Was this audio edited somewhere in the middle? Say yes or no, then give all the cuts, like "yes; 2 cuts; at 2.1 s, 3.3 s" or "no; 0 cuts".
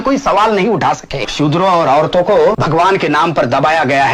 yes; 2 cuts; at 1.3 s, 2.6 s